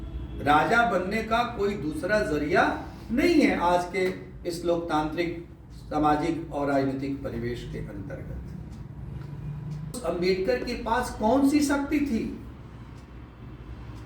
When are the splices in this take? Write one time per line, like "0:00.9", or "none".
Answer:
0:10.0